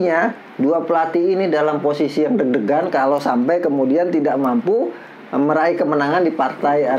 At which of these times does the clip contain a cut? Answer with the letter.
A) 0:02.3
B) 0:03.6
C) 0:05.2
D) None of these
D